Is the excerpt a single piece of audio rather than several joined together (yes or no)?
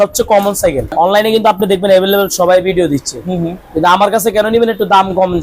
no